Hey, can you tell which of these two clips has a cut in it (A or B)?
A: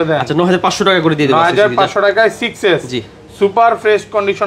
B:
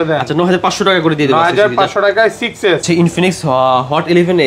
B